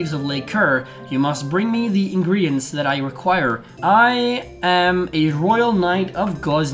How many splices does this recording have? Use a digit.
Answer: 1